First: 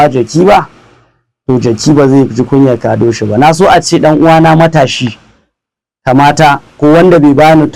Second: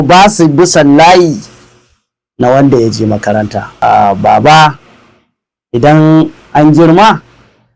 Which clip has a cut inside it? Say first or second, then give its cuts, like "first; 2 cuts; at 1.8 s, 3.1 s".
second; 1 cut; at 3.6 s